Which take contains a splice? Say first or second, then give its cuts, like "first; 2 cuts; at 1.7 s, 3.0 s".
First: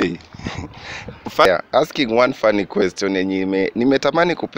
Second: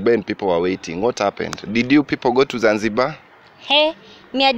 first; 1 cut; at 1.5 s